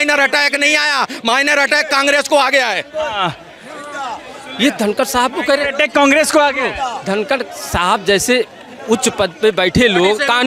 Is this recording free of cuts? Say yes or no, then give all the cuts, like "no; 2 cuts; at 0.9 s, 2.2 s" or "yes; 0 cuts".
yes; 0 cuts